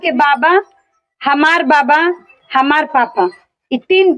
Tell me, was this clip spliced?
no; 0 cuts

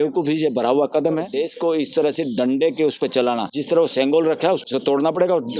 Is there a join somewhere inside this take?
yes; 3 cuts; at 1.3 s, 3.5 s, 4.6 s

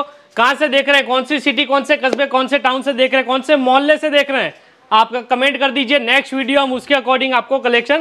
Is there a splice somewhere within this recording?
no; 0 cuts

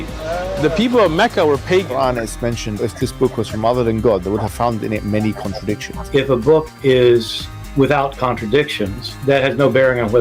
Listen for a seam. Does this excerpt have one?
yes; 1 cut; at 2.1 s

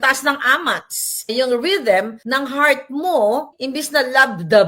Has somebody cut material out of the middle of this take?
yes; 3 cuts; at 1.3 s, 2.2 s, 3.5 s

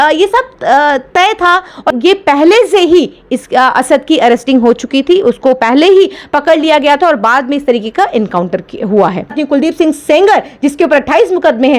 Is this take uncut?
no; 2 cuts; at 1.9 s, 9.3 s

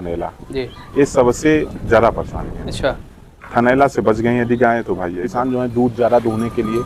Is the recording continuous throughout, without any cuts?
no; 1 cut; at 5.2 s

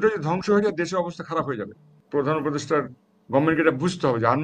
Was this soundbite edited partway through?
yes; 1 cut; at 2.0 s

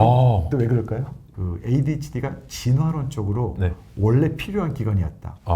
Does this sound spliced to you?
yes; 1 cut; at 1.2 s

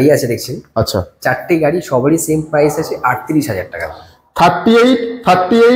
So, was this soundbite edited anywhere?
no; 0 cuts

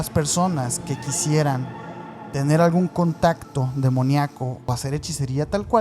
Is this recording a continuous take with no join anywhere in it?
no; 1 cut; at 4.7 s

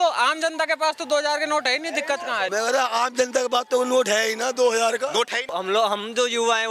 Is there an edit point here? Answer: yes; 2 cuts; at 2.5 s, 5.5 s

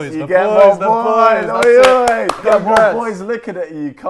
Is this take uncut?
no; 1 cut; at 2.4 s

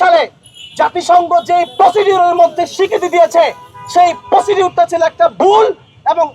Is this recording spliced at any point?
no; 0 cuts

